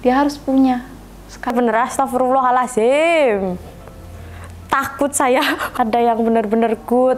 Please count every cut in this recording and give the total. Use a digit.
2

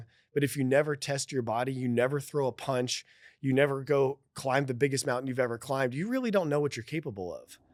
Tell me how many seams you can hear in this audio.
0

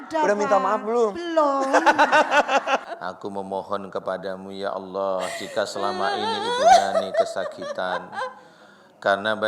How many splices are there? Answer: 1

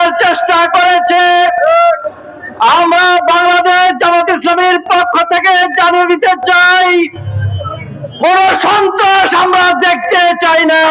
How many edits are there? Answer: 0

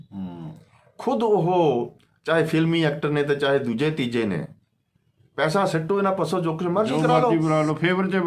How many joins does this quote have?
0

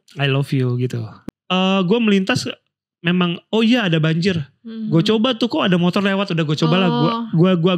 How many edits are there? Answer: 1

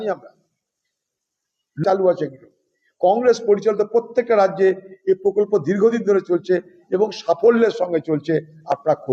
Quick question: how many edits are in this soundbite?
1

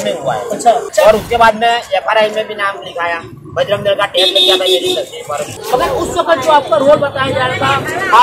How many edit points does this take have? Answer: 2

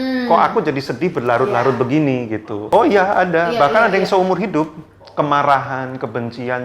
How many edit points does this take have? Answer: 1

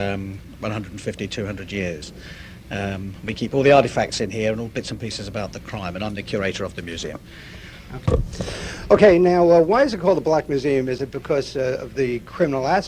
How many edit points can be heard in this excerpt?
1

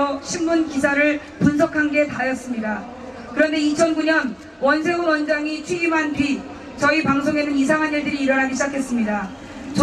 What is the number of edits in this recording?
1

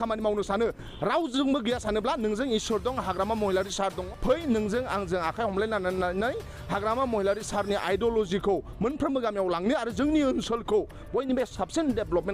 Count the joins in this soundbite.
1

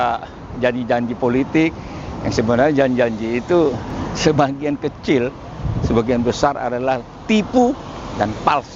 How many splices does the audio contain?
1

